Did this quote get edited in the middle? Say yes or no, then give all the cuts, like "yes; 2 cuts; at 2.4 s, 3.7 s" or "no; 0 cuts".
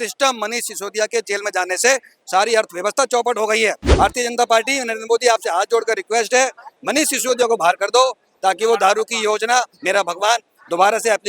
yes; 1 cut; at 3.8 s